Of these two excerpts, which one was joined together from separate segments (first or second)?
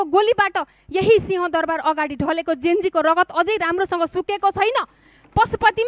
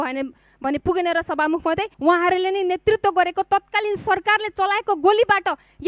second